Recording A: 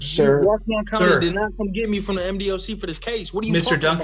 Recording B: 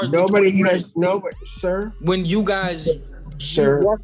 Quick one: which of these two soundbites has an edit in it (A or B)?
B